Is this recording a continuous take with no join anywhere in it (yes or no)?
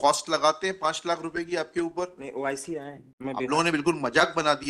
no